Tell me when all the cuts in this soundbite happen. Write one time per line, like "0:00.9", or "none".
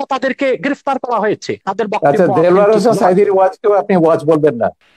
0:01.6